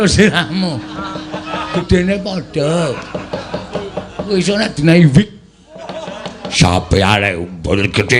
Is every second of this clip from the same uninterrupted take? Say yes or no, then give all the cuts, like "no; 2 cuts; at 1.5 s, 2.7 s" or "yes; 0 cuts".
no; 2 cuts; at 1.8 s, 6.4 s